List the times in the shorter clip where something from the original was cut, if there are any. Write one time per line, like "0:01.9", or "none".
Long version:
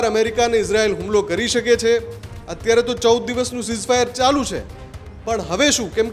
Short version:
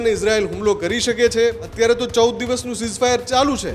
0:01.6